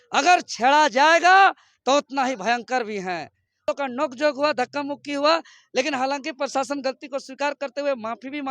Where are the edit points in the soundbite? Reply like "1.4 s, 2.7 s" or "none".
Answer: 3.5 s